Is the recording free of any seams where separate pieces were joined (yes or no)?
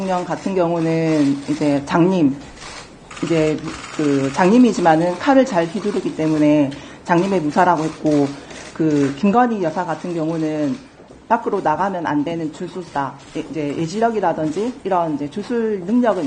yes